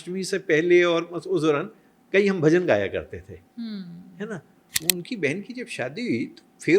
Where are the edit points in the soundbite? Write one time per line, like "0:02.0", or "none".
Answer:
0:04.8